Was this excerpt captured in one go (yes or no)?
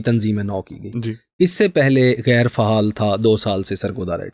yes